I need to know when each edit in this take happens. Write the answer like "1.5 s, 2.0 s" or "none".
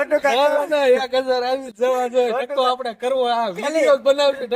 none

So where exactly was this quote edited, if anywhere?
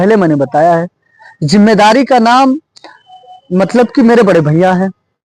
none

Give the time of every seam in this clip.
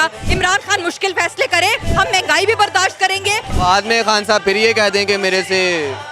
1.8 s, 3.5 s

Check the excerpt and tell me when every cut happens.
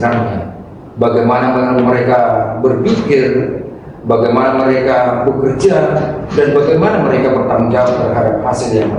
none

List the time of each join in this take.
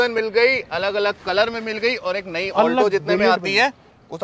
none

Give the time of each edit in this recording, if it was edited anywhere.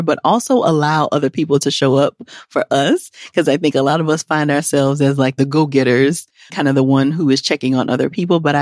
5.4 s, 6.5 s

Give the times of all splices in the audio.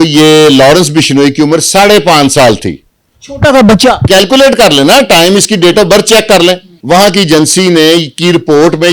6.7 s

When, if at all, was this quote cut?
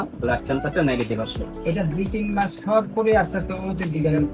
none

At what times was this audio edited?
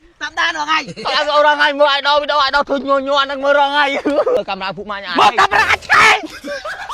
4.4 s

